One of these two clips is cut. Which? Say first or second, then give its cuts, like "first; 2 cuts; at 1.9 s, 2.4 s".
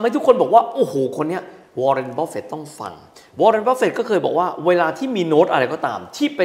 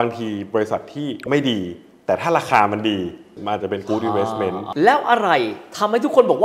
second; 1 cut; at 4.7 s